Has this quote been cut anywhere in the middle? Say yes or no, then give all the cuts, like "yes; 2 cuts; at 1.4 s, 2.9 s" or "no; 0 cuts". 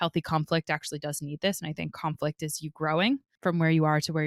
yes; 1 cut; at 3.3 s